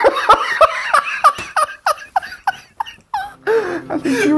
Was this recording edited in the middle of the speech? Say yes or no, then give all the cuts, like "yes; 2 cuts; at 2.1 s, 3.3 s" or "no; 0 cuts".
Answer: no; 0 cuts